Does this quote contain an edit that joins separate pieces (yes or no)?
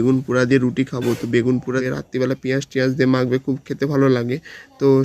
yes